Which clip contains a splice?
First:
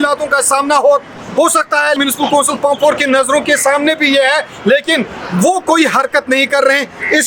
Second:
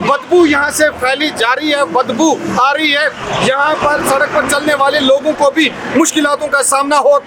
first; 1 cut; at 2.0 s

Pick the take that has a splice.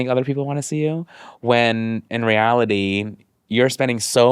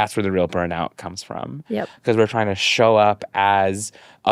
first; 1 cut; at 2.0 s

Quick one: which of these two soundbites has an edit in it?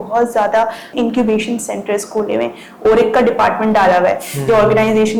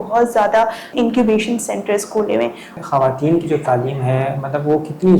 second; 1 cut; at 2.7 s

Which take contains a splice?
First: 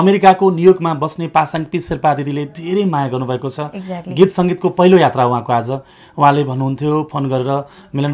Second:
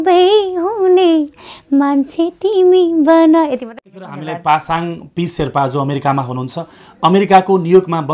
second; 1 cut; at 3.6 s

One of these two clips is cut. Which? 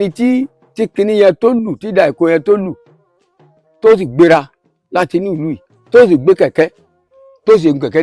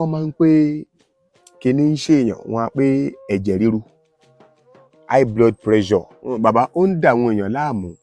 second; 1 cut; at 6.2 s

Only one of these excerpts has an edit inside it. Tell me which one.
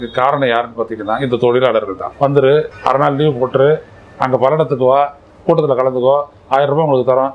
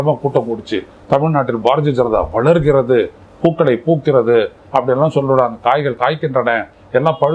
first; 2 cuts; at 2.0 s, 2.7 s

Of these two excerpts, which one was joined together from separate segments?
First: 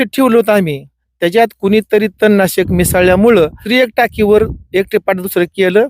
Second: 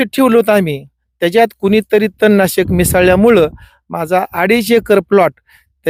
first; 1 cut; at 3.6 s

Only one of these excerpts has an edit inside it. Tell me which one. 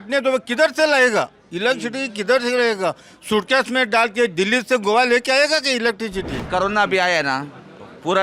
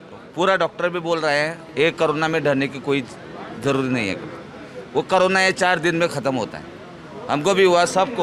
first; 1 cut; at 6.5 s

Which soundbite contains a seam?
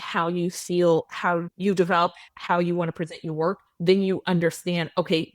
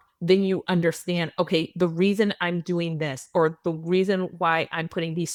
first; 2 cuts; at 1.5 s, 2.3 s

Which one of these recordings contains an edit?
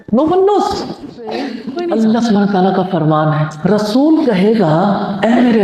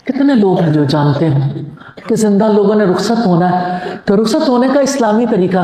first; 1 cut; at 1.7 s

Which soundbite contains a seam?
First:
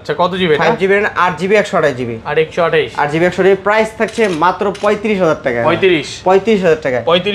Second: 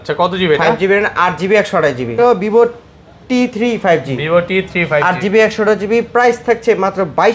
second; 1 cut; at 2.2 s

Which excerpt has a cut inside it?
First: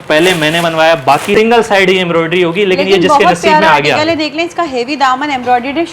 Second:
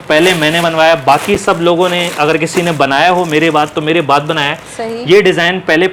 first; 1 cut; at 1.3 s

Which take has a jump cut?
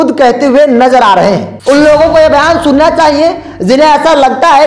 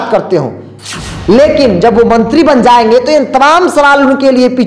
first; 1 cut; at 1.5 s

